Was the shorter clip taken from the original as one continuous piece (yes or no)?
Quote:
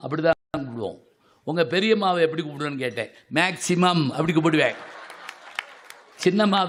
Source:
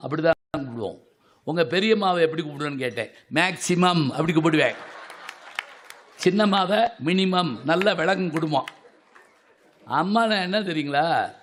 yes